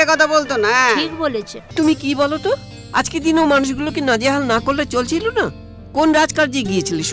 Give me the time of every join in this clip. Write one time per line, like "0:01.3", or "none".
0:01.6